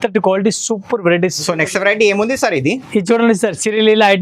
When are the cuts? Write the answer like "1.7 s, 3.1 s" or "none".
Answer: 1.4 s